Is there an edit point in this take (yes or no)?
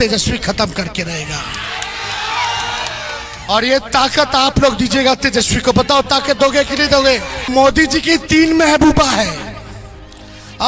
yes